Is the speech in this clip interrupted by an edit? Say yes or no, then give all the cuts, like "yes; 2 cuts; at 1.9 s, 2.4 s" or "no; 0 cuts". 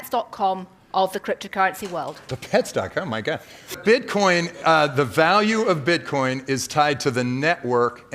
yes; 2 cuts; at 2.2 s, 3.8 s